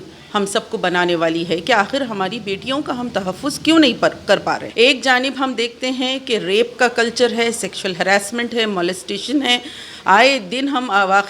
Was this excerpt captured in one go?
no; 1 cut; at 4.6 s

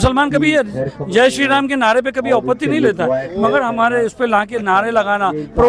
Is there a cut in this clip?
no; 0 cuts

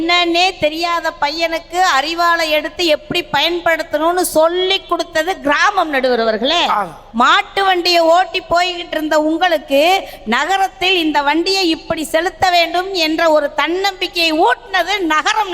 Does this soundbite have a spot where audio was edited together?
yes; 1 cut; at 7.0 s

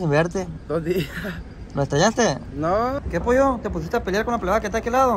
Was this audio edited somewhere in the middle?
yes; 1 cut; at 3.0 s

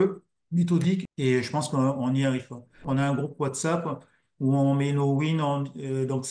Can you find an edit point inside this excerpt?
yes; 2 cuts; at 1.1 s, 2.8 s

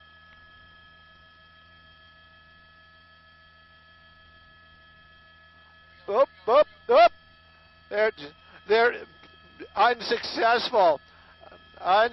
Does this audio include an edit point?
no; 0 cuts

